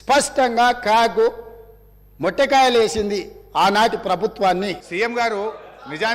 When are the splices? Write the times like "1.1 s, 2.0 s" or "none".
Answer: 4.8 s